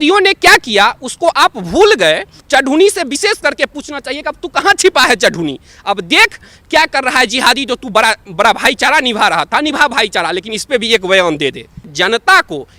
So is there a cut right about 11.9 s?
yes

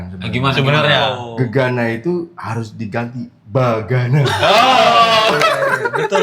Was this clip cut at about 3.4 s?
yes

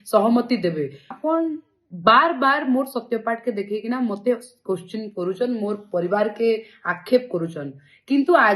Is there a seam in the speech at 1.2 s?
yes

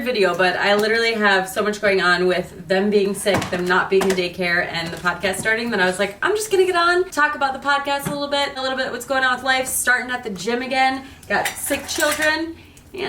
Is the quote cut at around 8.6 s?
yes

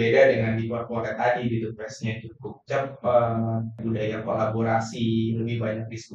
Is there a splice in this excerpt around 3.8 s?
yes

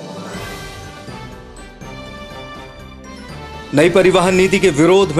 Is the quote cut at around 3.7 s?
yes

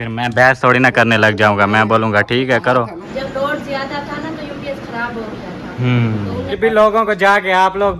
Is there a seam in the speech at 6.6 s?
yes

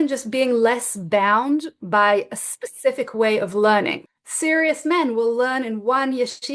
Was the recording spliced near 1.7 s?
no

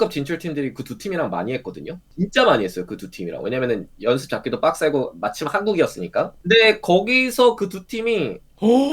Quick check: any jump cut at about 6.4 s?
yes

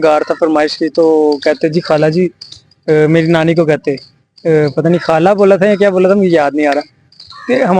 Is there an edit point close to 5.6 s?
no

